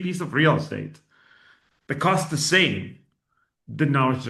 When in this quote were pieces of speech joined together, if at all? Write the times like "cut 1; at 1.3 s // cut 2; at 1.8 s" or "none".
none